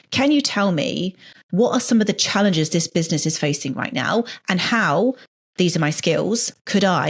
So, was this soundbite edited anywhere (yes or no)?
no